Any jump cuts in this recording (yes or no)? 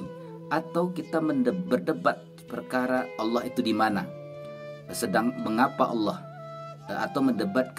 no